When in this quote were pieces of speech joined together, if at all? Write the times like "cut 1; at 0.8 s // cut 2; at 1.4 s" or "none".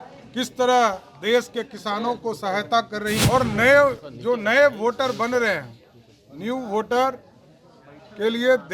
cut 1; at 3.2 s